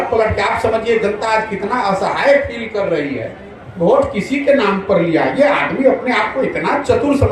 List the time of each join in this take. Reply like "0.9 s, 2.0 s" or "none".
none

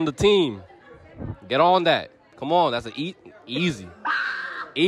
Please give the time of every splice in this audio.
none

